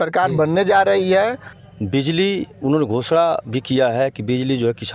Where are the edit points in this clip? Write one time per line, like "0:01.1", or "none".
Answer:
0:01.5